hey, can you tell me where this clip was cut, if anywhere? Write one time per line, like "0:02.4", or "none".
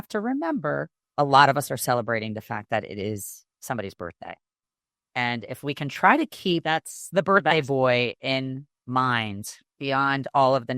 0:01.0